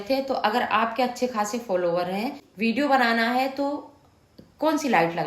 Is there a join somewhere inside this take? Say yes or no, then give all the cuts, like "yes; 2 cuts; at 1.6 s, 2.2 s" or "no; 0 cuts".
yes; 1 cut; at 2.4 s